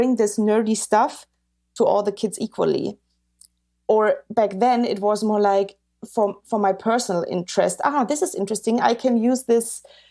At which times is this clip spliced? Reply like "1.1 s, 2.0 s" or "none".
none